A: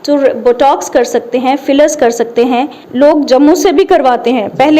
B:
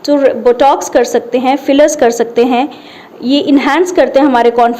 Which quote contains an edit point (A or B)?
A